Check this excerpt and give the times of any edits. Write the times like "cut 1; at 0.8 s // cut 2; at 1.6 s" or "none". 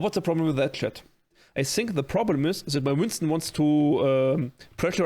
cut 1; at 1.4 s